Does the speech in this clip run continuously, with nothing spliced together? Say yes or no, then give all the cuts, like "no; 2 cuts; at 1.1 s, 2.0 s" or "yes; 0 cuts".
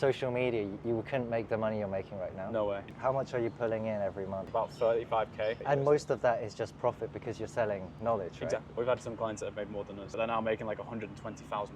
no; 5 cuts; at 2.9 s, 4.4 s, 5.6 s, 8.7 s, 10.0 s